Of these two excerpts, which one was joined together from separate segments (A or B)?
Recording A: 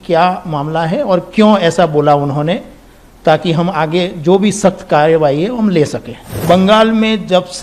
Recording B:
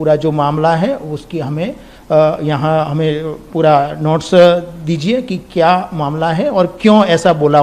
A